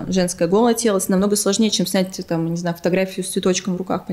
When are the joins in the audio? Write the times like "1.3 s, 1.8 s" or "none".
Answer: none